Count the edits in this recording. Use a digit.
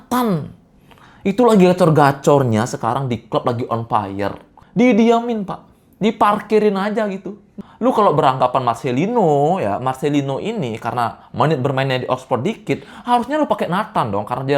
0